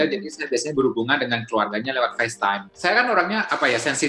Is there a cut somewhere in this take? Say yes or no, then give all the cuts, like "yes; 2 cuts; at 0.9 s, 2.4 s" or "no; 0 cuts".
yes; 1 cut; at 2.7 s